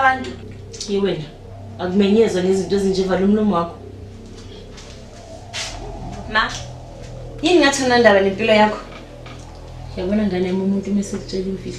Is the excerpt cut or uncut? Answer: uncut